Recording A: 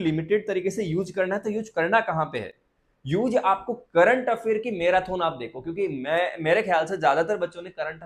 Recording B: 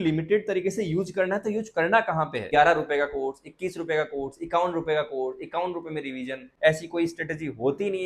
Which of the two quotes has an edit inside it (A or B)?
B